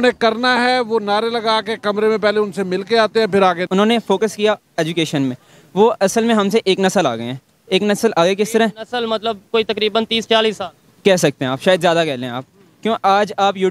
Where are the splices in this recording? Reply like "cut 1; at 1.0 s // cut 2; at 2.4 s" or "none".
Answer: cut 1; at 3.6 s